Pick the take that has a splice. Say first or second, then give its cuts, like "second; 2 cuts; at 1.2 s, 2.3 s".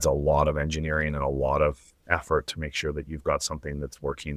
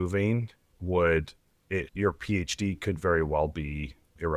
second; 1 cut; at 1.9 s